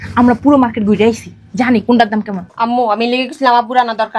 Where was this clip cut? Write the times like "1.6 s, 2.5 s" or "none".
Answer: 2.4 s

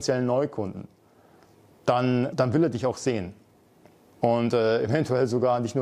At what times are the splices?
2.3 s

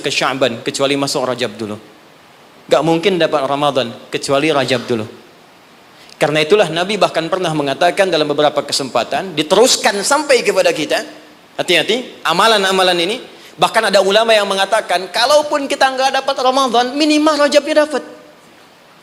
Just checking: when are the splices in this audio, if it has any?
none

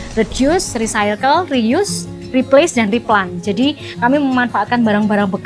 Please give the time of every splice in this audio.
none

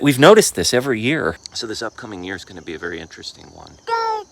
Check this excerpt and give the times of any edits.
1.4 s

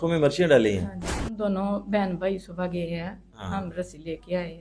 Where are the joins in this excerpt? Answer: 1.3 s

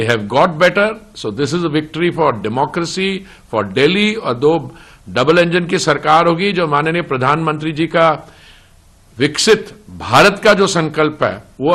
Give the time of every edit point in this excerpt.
none

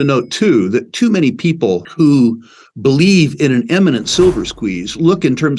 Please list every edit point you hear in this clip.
1.9 s

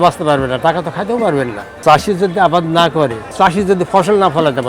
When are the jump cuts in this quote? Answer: 1.8 s, 3.3 s

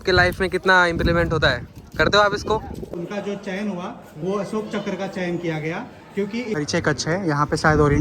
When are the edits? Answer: 2.9 s, 6.6 s

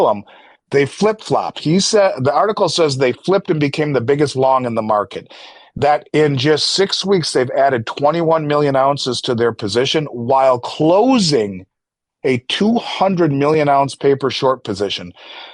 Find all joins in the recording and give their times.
none

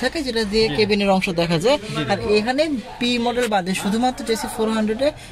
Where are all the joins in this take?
none

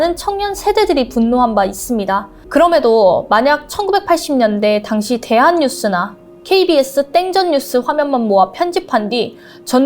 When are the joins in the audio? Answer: 2.3 s

